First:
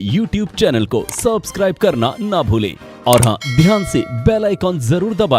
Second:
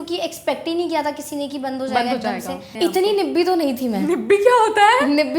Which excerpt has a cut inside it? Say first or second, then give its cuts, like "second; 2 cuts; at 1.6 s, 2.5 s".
second; 1 cut; at 2.7 s